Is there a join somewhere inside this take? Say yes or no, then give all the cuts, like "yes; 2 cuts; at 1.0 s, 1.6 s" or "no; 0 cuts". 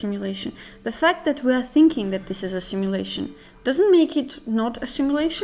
no; 0 cuts